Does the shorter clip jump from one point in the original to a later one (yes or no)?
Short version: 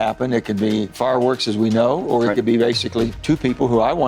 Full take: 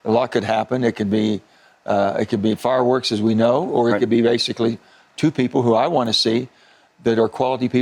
yes